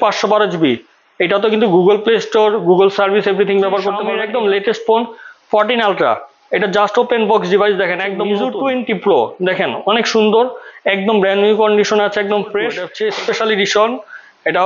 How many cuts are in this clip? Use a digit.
3